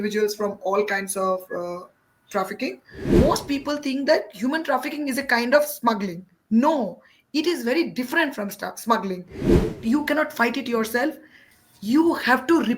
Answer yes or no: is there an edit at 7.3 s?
no